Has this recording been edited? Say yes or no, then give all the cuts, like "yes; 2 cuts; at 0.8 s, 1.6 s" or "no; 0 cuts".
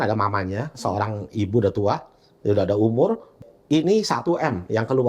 yes; 1 cut; at 3.4 s